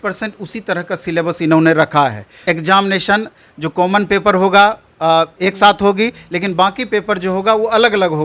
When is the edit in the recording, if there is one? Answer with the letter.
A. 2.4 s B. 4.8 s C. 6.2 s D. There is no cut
A